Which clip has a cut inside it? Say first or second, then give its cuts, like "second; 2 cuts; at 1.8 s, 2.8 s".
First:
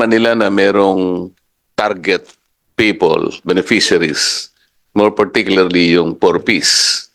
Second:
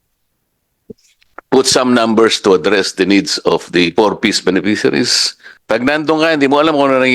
second; 1 cut; at 5.5 s